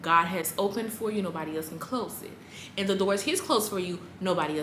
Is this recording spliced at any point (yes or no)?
no